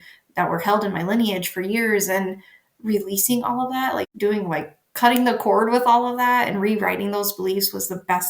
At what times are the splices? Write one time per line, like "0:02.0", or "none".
0:04.1